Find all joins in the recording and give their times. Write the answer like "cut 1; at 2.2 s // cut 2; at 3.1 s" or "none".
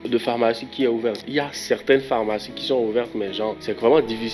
none